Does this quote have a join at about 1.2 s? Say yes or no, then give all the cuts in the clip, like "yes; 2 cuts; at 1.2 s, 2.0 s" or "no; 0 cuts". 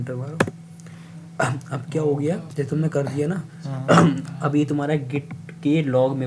no; 0 cuts